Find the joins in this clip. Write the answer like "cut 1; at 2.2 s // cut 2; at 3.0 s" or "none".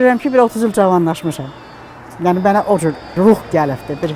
cut 1; at 3.1 s